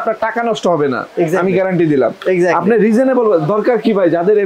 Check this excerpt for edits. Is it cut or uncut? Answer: uncut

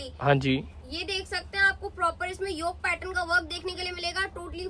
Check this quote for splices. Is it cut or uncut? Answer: uncut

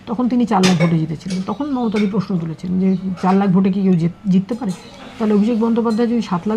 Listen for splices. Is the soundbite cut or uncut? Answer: uncut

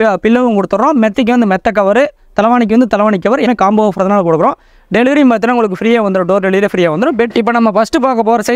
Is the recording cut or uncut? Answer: cut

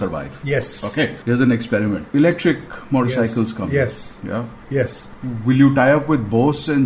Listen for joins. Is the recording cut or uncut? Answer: cut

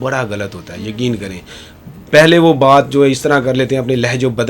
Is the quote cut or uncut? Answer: uncut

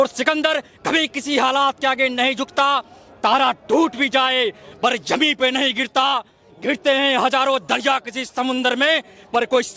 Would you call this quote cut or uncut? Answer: uncut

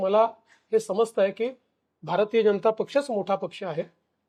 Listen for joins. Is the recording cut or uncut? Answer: uncut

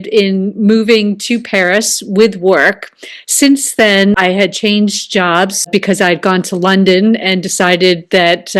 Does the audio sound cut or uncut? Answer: cut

